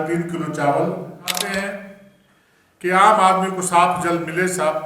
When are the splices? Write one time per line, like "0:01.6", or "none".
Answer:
0:01.5

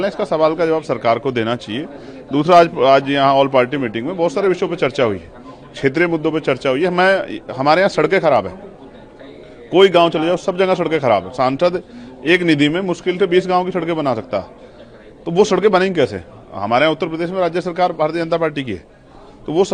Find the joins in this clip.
none

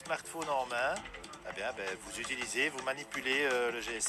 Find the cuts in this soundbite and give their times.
none

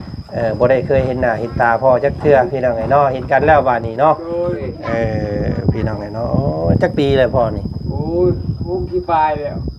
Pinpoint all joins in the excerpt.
0:04.7

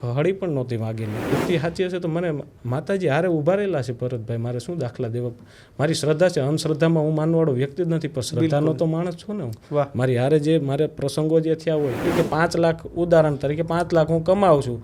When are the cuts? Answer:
0:01.3
0:12.1

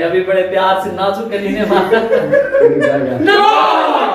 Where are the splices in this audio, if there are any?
none

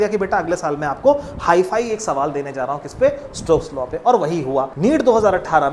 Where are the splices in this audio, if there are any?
0:04.7

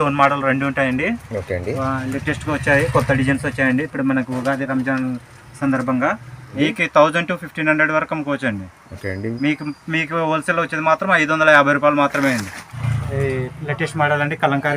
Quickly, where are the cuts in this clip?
0:06.5
0:12.9

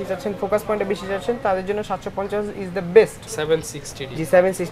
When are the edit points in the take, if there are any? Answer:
0:03.3

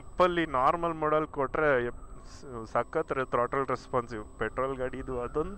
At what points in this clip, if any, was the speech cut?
none

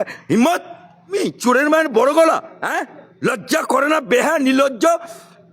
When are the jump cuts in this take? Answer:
0:01.1

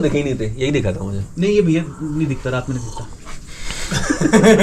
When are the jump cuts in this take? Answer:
none

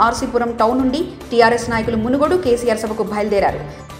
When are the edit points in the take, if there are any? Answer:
none

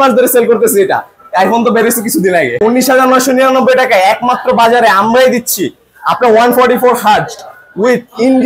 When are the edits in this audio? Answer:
0:02.6

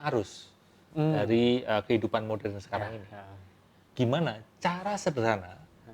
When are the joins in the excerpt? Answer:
0:03.8

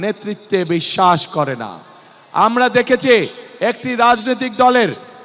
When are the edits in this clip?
none

